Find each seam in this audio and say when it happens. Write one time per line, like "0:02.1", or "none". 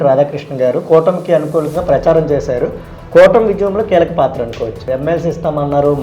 0:04.8